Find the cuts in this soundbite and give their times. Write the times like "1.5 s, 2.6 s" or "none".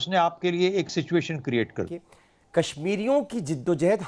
1.9 s